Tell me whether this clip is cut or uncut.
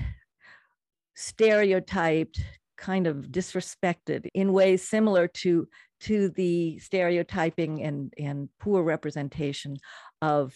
uncut